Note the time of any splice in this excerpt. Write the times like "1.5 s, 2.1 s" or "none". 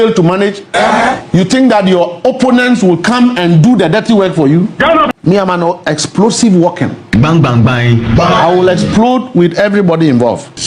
5.1 s